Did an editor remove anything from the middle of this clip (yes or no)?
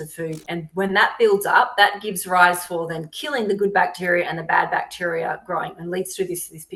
no